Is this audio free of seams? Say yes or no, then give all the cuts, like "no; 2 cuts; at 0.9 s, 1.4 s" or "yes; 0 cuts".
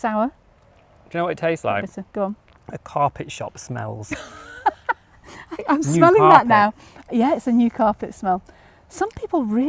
yes; 0 cuts